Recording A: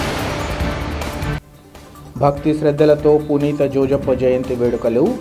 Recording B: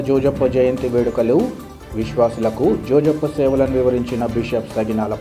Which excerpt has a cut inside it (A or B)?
A